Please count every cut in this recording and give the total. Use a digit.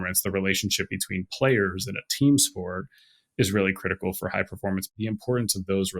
1